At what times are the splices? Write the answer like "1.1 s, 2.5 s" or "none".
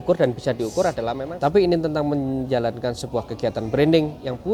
1.2 s